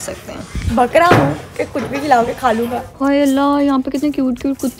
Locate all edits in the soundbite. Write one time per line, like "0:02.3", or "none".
0:02.8